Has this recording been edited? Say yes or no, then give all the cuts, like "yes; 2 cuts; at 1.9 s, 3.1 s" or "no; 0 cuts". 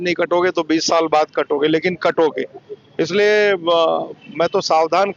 no; 0 cuts